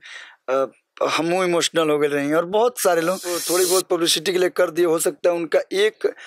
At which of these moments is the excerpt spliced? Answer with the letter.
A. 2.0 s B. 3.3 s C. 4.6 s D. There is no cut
B